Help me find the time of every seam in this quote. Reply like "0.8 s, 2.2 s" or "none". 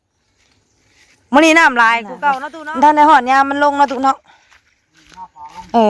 2.5 s